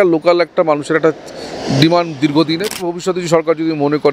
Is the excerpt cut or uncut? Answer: cut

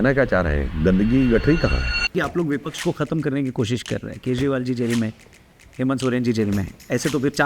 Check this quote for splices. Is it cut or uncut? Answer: cut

